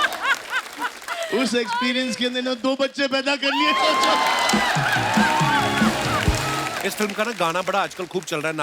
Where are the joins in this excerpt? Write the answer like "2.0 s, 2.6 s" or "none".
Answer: 6.7 s